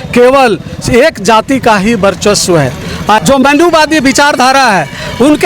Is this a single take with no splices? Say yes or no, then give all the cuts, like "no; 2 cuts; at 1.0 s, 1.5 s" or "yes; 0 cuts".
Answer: no; 1 cut; at 3.2 s